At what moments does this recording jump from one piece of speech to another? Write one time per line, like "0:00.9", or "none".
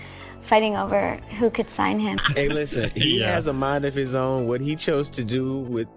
0:02.2